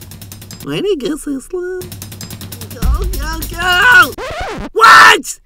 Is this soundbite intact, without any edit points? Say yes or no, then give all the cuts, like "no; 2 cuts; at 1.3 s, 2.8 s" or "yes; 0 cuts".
no; 1 cut; at 1.8 s